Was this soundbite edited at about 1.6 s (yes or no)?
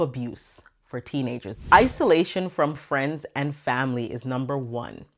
yes